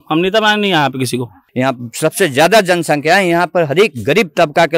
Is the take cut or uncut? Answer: cut